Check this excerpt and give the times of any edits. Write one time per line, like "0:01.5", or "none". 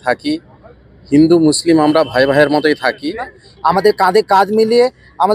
0:03.1